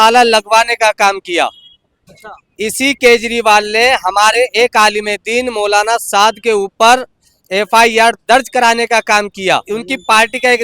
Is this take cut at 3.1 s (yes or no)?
no